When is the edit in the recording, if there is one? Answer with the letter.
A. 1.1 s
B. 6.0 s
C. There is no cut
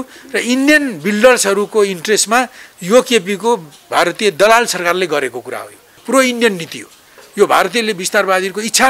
B